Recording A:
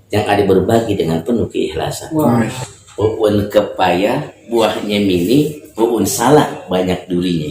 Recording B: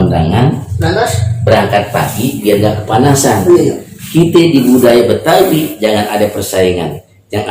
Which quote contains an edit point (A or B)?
A